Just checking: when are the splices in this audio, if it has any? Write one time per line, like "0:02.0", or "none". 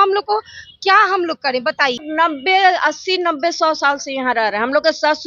0:02.0

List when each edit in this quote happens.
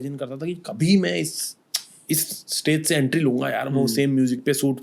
none

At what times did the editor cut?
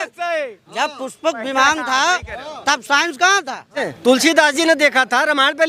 0:03.9

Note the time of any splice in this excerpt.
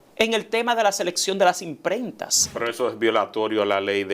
0:02.5

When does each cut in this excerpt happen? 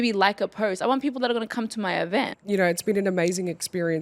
0:02.3

